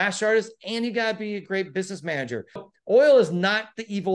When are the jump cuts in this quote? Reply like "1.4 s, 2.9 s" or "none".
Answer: 2.7 s